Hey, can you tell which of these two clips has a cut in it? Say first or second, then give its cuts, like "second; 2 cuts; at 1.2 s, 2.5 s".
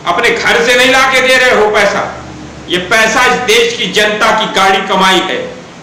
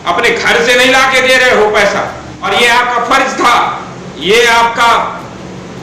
second; 1 cut; at 2.3 s